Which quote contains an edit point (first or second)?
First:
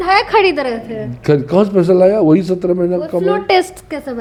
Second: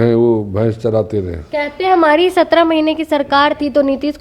second